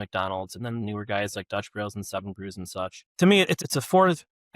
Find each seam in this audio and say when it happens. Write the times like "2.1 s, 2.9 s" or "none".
3.0 s, 3.6 s